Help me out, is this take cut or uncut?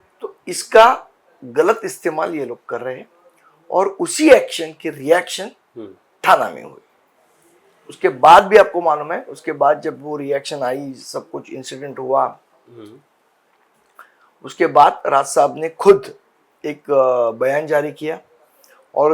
uncut